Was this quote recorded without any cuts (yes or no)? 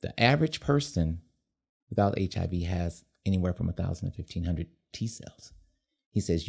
yes